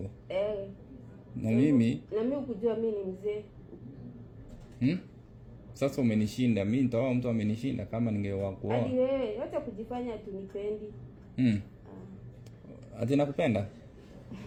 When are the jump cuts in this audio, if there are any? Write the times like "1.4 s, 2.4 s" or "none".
none